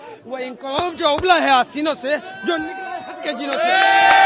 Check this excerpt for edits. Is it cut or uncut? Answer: uncut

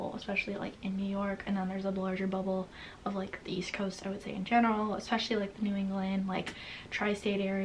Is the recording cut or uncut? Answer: uncut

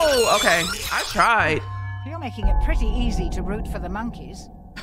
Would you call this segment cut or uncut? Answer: uncut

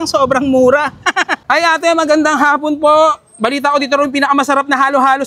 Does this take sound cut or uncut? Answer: cut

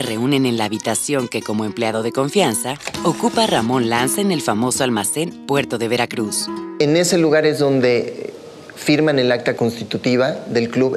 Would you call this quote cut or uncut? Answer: uncut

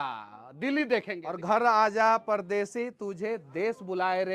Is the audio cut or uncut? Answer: cut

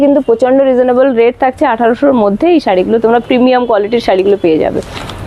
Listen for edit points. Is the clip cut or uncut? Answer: uncut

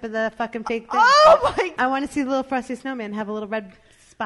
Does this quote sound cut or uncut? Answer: cut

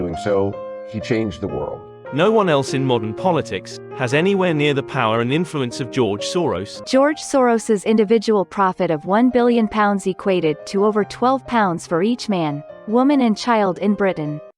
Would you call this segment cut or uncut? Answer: cut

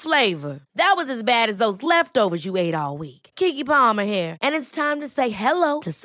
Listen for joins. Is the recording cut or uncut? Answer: uncut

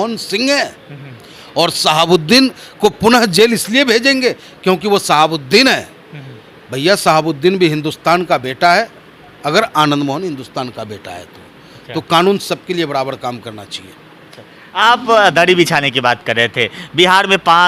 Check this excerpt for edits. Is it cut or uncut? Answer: uncut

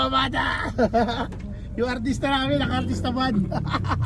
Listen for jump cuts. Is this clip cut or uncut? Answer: uncut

